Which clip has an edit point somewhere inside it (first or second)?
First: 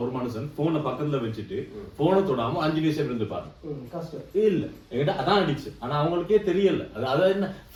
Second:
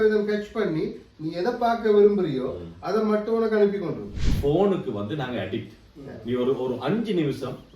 second